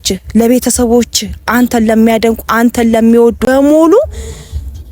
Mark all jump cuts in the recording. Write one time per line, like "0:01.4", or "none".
0:03.4